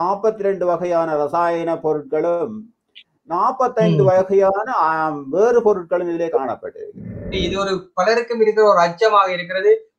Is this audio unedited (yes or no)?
no